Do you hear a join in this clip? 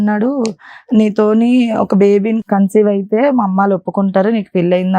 yes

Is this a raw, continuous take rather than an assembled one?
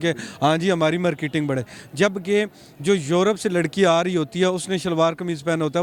yes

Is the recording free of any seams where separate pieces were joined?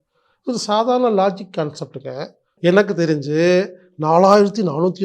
no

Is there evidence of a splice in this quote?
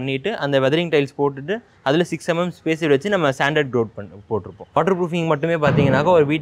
yes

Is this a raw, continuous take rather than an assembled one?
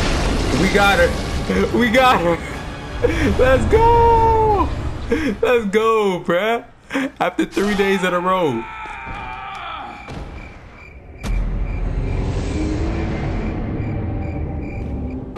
yes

